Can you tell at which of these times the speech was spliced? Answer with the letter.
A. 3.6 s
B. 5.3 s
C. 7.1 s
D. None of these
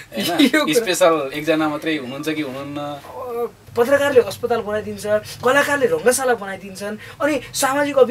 A